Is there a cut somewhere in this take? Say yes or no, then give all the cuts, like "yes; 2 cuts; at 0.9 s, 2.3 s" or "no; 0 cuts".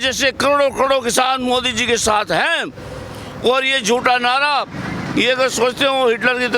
no; 0 cuts